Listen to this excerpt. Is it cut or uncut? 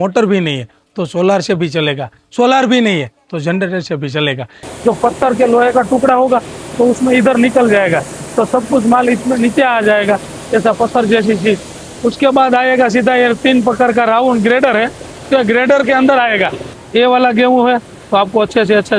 cut